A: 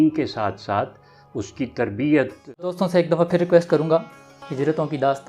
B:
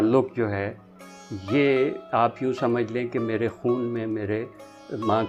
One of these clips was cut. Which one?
A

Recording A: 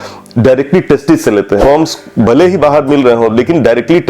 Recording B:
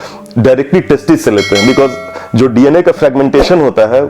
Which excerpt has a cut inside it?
A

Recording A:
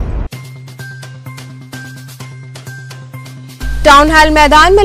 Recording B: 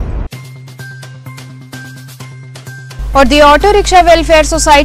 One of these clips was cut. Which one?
A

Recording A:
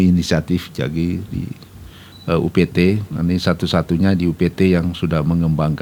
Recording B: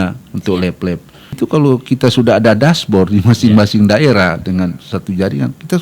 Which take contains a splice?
B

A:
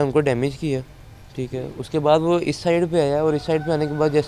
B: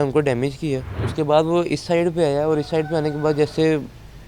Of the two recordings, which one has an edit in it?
B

